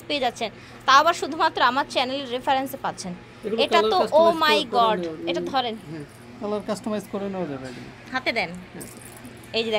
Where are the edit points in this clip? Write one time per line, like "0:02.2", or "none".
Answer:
none